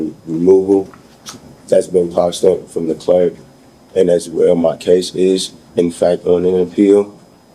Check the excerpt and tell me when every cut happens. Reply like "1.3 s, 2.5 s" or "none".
none